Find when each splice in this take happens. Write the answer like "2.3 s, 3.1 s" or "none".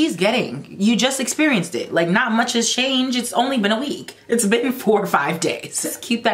none